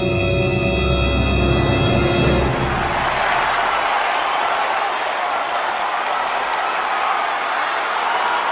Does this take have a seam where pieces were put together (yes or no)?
yes